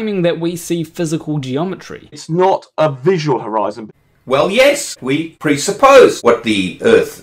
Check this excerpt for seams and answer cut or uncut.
cut